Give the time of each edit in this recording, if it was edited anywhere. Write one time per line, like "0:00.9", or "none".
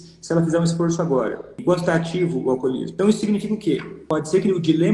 0:01.5
0:02.9
0:03.9